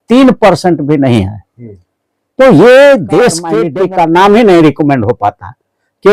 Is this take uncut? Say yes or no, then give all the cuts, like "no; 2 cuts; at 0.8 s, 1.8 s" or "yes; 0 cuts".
no; 1 cut; at 3.6 s